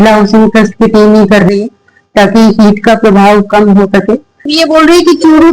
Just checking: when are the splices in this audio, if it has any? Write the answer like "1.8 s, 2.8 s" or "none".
4.5 s